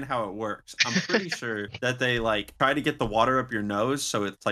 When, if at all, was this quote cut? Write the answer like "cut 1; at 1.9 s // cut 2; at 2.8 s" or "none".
cut 1; at 2.5 s